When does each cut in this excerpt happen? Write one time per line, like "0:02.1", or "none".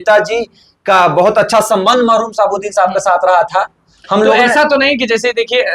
none